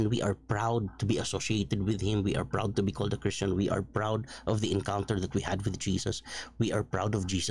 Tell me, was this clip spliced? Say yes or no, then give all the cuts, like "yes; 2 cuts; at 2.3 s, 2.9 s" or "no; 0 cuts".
no; 0 cuts